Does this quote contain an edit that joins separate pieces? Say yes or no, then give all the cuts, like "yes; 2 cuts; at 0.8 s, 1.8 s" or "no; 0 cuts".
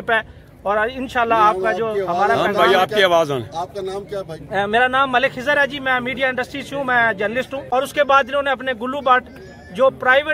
yes; 1 cut; at 7.6 s